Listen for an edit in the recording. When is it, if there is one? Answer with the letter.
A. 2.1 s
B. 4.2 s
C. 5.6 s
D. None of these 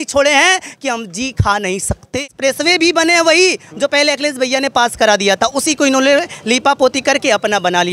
A